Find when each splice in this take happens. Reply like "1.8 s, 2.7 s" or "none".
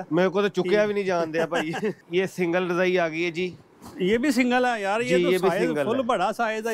2.0 s